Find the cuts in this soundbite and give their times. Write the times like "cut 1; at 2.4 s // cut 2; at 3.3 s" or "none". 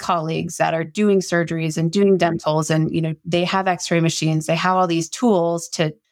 none